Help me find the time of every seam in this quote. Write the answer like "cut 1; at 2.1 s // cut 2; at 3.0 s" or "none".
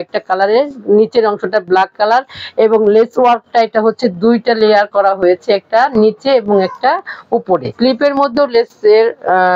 cut 1; at 7.7 s